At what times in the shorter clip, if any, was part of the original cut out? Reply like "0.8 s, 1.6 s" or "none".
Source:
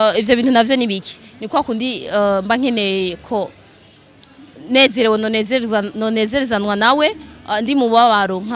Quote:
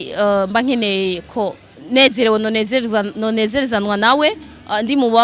1.7 s